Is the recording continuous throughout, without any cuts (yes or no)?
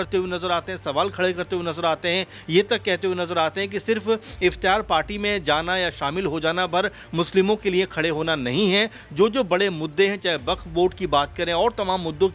yes